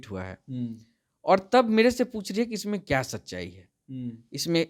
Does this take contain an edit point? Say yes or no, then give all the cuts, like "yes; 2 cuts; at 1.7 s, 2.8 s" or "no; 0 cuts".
no; 0 cuts